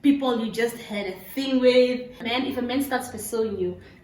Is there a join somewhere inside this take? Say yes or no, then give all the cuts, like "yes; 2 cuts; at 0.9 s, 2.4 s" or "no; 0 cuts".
yes; 1 cut; at 2.3 s